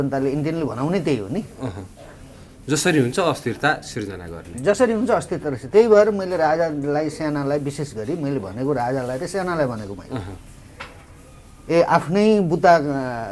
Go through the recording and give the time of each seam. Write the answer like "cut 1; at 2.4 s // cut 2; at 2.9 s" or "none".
none